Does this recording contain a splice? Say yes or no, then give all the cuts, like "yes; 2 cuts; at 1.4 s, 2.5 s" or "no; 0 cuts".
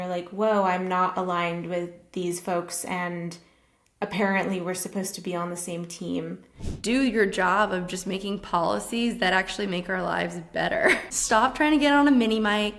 yes; 2 cuts; at 6.7 s, 11.1 s